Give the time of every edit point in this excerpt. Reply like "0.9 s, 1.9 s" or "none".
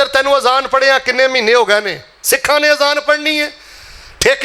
none